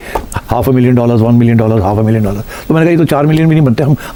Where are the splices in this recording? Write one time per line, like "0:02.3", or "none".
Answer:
none